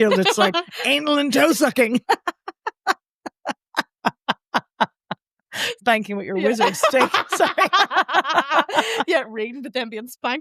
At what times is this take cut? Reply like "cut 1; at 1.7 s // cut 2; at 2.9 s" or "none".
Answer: cut 1; at 5.7 s

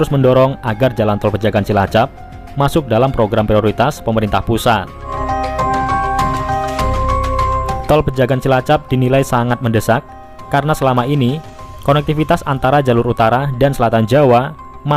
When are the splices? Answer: cut 1; at 5.2 s

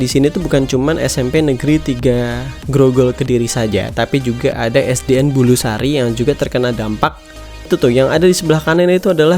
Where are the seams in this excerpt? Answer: cut 1; at 7.7 s

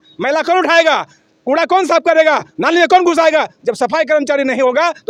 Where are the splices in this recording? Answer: none

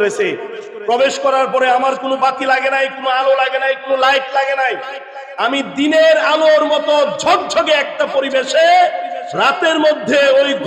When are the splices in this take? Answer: none

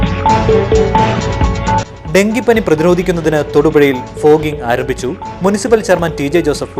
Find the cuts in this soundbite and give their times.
none

